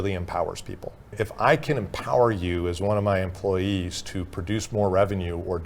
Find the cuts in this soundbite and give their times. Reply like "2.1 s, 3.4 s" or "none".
1.1 s